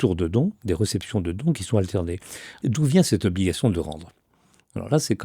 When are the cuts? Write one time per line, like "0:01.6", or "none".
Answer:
0:02.6